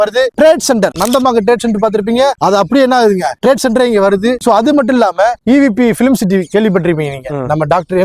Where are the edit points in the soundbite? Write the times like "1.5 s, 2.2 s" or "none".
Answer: 1.0 s